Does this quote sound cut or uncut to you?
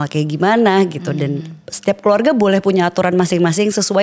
uncut